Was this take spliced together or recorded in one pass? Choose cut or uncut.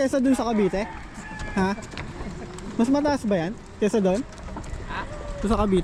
uncut